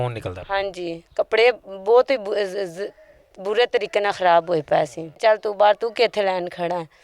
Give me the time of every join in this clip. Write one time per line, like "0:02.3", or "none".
0:05.2